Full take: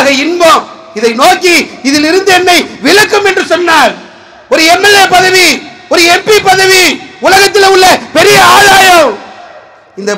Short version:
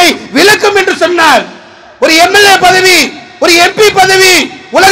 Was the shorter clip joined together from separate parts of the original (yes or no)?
no